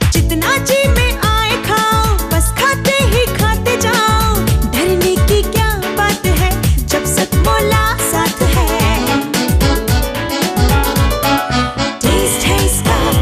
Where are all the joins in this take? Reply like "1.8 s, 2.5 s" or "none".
none